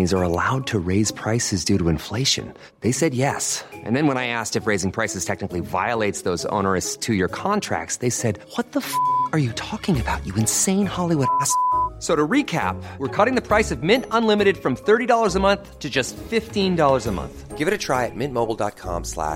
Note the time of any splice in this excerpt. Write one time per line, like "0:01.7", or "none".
none